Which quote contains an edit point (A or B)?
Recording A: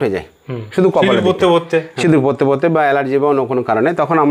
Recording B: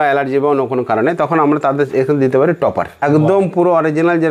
B